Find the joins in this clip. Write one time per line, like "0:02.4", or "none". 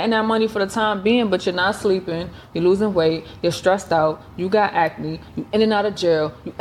none

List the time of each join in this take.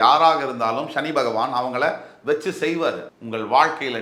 0:03.1

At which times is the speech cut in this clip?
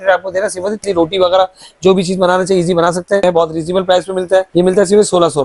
0:00.8
0:03.2
0:04.5

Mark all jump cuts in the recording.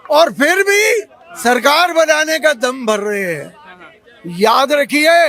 none

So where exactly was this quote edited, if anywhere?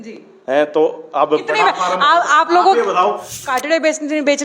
0:03.5

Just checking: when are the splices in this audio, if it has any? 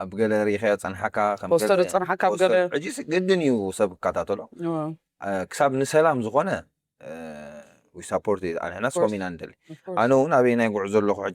none

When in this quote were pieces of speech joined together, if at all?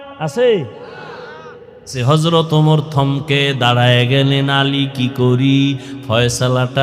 0:02.0

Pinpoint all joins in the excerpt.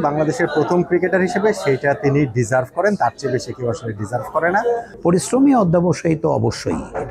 0:04.9

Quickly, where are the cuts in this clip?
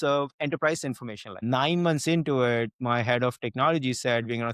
0:01.3

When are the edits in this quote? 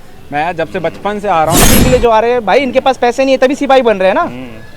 0:01.7

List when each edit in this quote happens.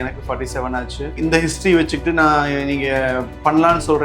0:01.1

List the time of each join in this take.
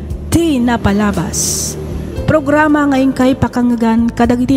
0:01.2

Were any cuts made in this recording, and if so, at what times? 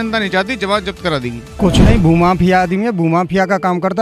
0:01.4

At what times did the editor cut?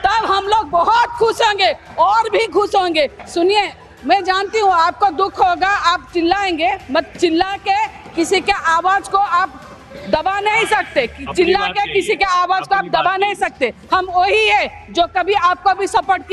0:03.2

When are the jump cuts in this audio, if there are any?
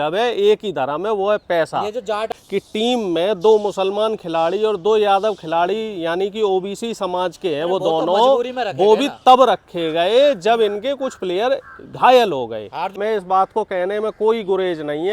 0:02.2
0:13.0

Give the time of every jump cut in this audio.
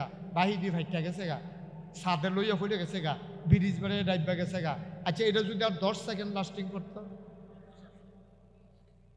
none

